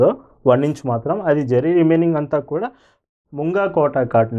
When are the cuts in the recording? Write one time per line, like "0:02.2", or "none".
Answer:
0:03.1